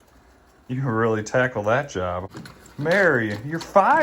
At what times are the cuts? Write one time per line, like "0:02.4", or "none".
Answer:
0:02.3